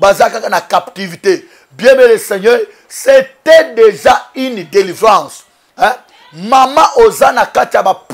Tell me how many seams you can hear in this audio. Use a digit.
0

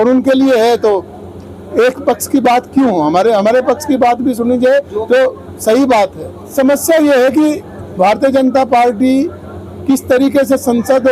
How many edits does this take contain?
1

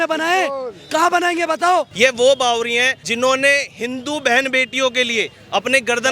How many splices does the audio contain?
2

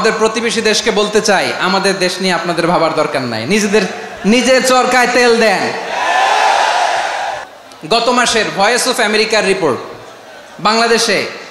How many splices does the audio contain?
1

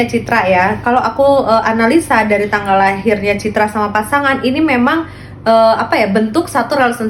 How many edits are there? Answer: 0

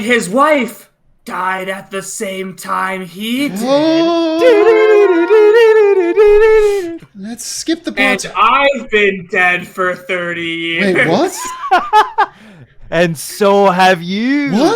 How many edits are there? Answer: 1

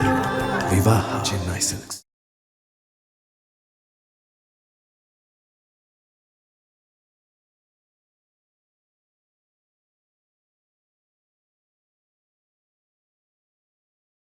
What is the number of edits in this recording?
0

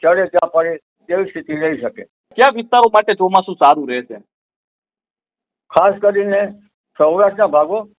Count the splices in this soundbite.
1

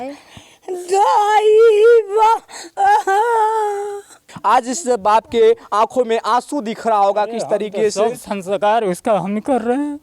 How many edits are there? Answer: 1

